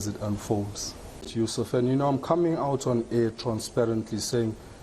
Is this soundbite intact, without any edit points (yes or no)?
no